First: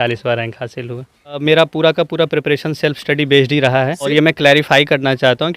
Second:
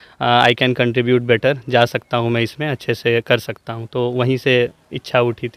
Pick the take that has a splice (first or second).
first